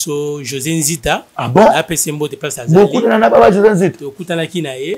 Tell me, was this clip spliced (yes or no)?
no